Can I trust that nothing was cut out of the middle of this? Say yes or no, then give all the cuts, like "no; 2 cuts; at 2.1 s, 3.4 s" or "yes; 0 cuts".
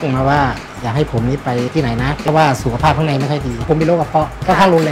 no; 2 cuts; at 2.2 s, 3.7 s